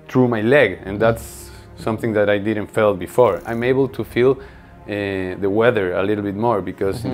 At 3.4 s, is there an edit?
yes; 1 cut; at 3.4 s

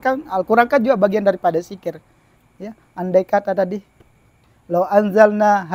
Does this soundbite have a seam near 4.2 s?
no; 0 cuts

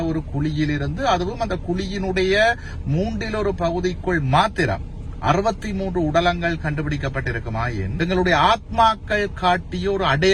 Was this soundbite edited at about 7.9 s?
yes; 1 cut; at 7.9 s

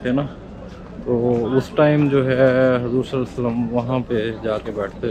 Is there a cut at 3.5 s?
no; 0 cuts

